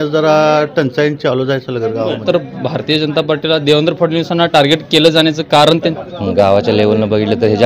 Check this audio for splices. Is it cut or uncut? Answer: cut